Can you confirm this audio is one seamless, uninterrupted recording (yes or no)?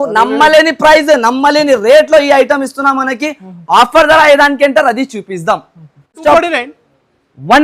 no